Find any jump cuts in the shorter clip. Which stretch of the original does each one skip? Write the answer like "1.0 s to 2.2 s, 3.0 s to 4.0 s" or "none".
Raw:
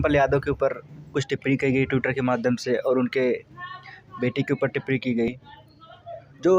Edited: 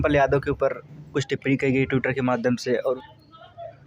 3.0 s to 5.4 s